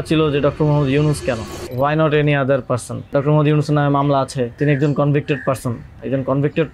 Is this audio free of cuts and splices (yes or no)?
no